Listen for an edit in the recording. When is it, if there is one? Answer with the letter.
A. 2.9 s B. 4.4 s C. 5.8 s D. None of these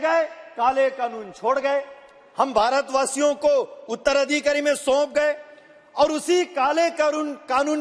D